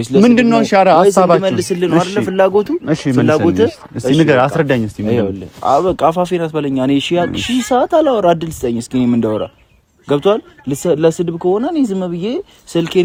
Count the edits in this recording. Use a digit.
0